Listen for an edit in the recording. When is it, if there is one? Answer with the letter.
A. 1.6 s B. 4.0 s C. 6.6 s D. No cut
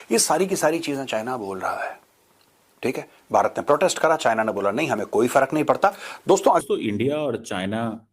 C